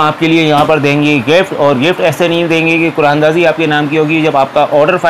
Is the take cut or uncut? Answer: uncut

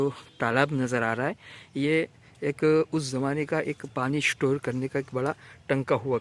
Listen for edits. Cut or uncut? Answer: uncut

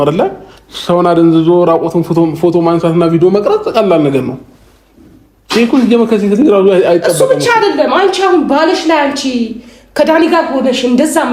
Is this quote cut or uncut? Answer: uncut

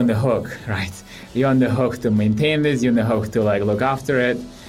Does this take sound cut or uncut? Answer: uncut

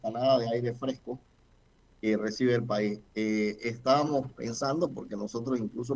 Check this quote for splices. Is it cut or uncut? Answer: uncut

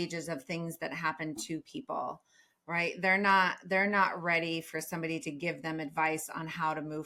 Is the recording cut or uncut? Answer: uncut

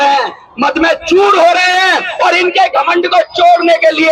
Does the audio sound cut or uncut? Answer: uncut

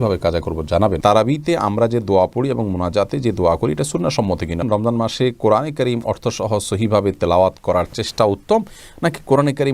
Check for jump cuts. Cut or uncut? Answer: cut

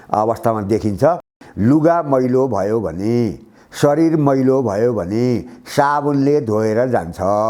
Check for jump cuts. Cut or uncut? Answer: cut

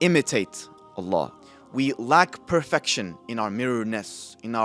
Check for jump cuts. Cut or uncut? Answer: cut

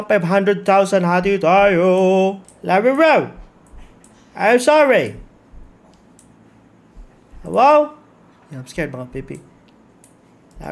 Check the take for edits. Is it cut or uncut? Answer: cut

